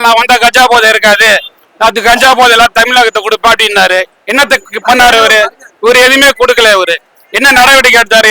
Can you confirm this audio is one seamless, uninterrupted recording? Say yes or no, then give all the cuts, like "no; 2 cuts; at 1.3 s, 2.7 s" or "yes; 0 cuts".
yes; 0 cuts